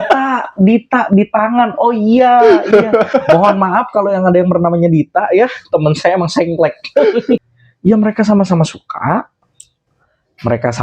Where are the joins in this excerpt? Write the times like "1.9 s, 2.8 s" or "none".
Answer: 7.5 s